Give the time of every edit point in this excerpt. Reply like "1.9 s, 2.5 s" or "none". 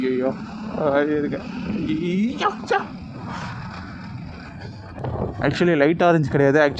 4.9 s